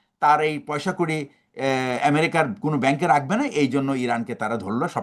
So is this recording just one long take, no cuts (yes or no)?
yes